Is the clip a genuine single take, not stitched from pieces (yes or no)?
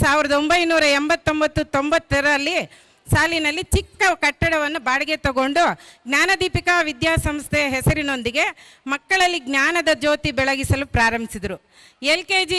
yes